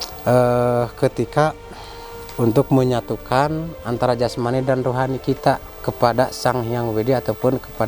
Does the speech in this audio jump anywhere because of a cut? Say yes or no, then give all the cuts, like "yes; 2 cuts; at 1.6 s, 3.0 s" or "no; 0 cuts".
no; 0 cuts